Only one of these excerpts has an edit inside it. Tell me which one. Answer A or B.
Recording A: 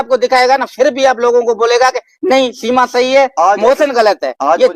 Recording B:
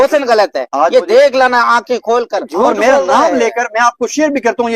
B